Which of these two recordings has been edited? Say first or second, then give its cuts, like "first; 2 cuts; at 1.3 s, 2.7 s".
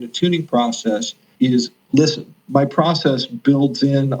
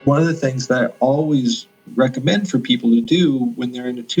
first; 2 cuts; at 1.2 s, 2.3 s